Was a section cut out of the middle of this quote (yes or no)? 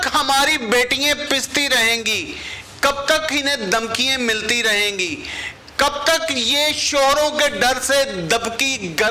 no